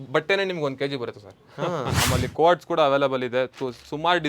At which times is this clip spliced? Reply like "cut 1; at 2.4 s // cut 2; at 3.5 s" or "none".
cut 1; at 2.0 s

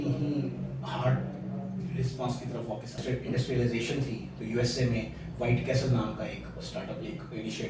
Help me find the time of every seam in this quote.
cut 1; at 3.0 s

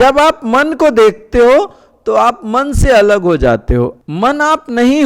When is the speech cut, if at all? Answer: cut 1; at 4.0 s

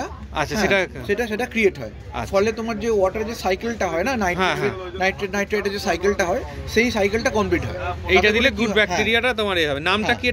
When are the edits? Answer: none

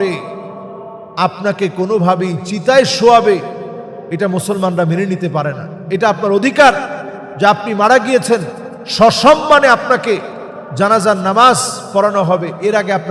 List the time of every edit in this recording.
none

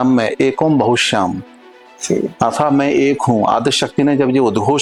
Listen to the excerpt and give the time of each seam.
none

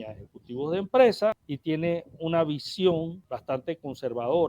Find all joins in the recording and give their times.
cut 1; at 1.5 s // cut 2; at 3.3 s

